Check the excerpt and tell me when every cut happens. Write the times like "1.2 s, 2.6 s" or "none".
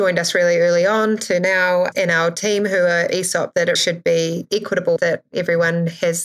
1.9 s, 3.8 s, 5.0 s